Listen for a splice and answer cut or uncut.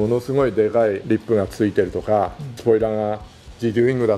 uncut